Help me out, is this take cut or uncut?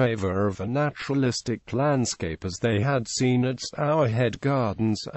cut